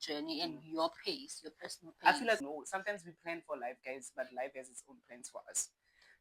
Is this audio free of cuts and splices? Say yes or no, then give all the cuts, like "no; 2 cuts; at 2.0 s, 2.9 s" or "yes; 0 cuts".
no; 1 cut; at 2.4 s